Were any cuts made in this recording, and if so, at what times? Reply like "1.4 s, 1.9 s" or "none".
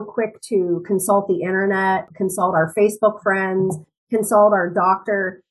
2.1 s